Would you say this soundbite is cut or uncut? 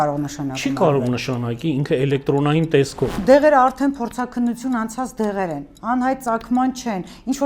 cut